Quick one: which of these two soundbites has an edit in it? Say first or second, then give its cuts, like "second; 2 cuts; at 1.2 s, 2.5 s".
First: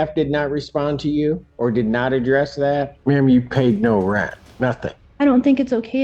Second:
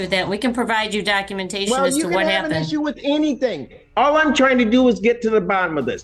first; 3 cuts; at 1.5 s, 2.9 s, 4.7 s